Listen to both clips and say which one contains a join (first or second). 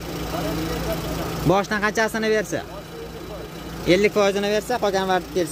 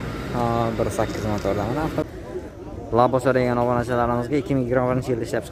second